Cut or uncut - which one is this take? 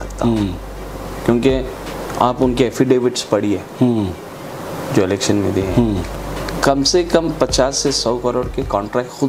uncut